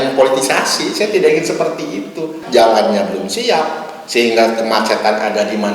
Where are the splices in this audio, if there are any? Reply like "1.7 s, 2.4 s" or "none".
2.4 s